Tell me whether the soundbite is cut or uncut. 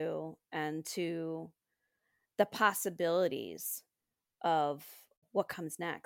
cut